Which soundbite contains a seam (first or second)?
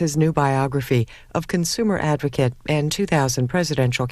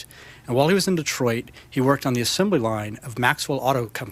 second